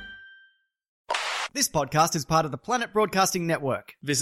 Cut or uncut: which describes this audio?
cut